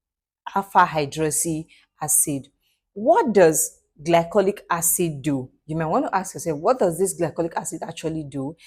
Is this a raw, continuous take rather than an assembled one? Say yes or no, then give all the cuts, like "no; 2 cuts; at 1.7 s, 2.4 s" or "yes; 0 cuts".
yes; 0 cuts